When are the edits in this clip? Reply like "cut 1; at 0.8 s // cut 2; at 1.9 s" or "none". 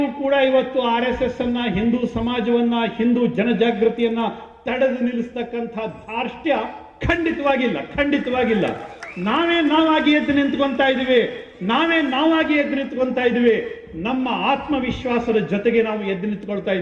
none